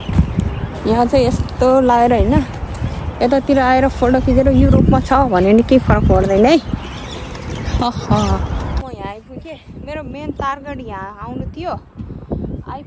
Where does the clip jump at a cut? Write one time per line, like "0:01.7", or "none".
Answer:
0:08.8

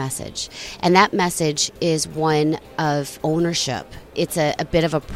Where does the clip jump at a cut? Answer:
0:03.1
0:04.1

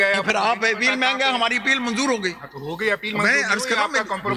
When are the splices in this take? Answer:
none

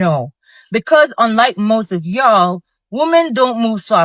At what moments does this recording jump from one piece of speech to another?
0:01.2

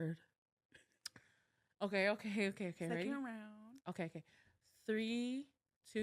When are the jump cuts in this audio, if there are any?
none

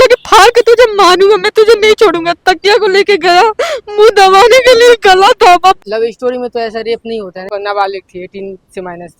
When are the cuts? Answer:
0:05.8
0:07.4

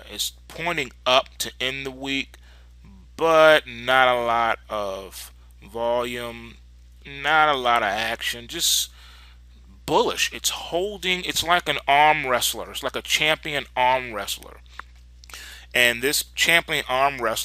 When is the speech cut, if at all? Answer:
0:12.1

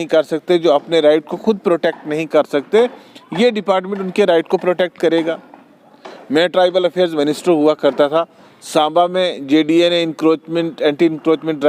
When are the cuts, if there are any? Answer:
none

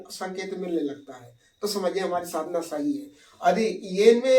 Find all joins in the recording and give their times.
none

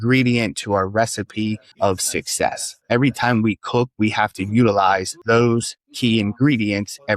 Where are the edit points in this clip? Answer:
0:01.7
0:02.7
0:05.1

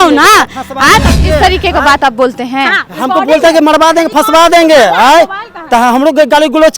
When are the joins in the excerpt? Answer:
0:01.1

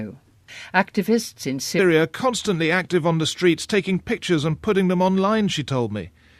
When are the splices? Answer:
none

